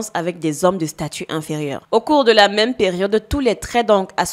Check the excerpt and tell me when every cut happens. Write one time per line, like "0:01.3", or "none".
0:01.8